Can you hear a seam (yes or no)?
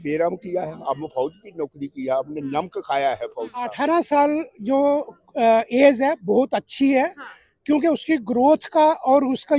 yes